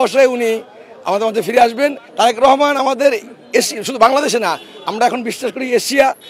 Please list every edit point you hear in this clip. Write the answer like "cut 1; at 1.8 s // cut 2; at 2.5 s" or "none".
cut 1; at 2.0 s

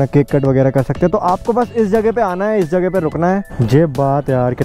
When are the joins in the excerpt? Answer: cut 1; at 3.4 s

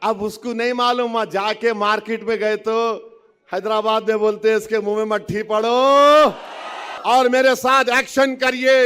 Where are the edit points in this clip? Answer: cut 1; at 6.9 s

